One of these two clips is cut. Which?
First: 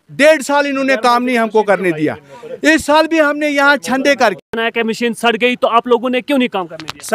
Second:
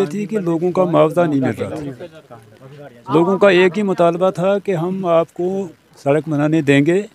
first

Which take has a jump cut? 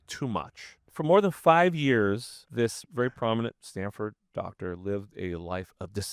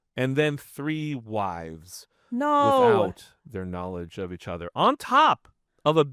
first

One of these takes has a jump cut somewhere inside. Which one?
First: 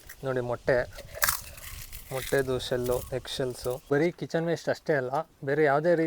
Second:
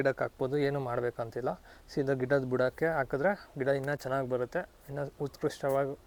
first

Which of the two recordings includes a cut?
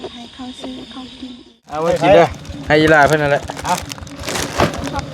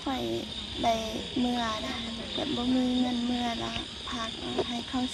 first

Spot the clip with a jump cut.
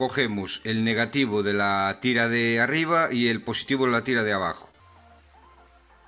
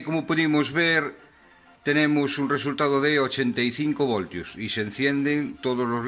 first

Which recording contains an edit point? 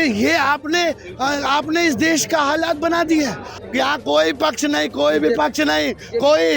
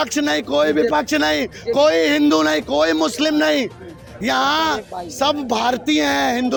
first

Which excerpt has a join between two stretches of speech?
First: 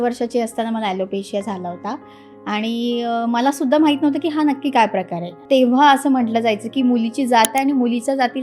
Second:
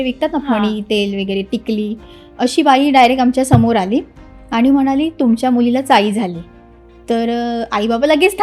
first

